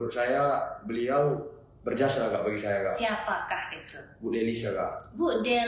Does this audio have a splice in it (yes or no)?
no